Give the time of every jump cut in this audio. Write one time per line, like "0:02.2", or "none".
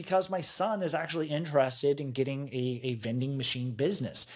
none